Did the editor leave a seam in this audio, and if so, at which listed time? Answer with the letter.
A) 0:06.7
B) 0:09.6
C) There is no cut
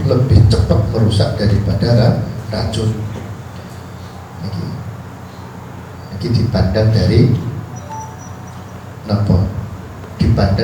C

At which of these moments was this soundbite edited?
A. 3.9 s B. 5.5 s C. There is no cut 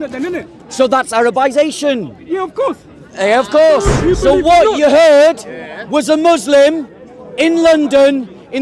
A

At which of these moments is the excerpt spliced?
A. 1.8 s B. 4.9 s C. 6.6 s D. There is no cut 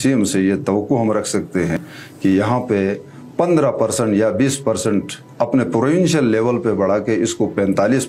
A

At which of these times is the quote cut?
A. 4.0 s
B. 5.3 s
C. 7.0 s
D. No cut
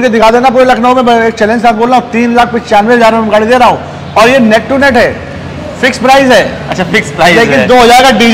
D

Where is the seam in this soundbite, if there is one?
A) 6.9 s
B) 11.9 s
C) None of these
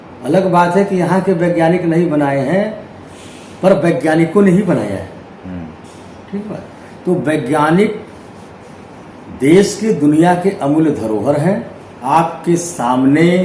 B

